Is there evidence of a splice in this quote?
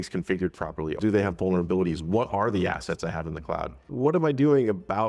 yes; 2 cuts; at 1.0 s, 3.8 s

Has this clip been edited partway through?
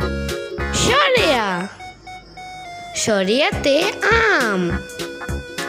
yes; 4 cuts; at 0.8 s, 1.7 s, 3.0 s, 4.7 s

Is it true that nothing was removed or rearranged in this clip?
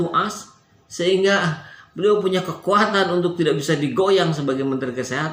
yes; 0 cuts

